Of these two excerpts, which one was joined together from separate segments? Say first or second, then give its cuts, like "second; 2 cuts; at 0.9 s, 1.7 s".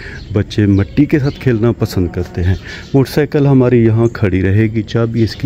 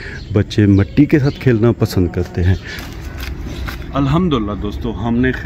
second; 1 cut; at 2.7 s